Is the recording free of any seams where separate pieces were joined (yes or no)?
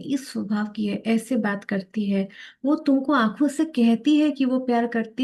yes